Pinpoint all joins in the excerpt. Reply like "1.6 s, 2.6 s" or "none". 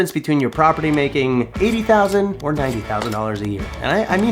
none

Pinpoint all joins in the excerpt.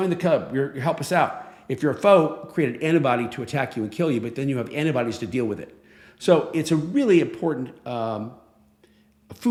none

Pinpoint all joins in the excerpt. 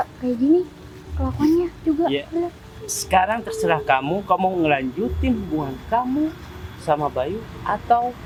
none

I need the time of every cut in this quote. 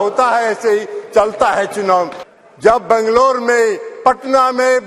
2.2 s

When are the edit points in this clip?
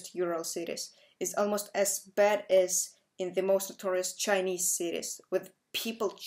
none

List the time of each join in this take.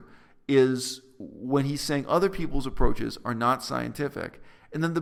none

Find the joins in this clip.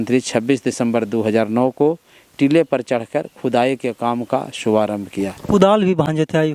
none

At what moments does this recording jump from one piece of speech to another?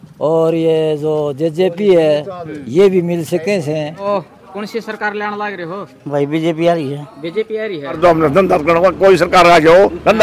4.0 s, 8.0 s

